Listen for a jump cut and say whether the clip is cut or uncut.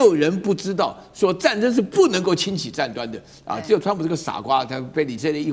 uncut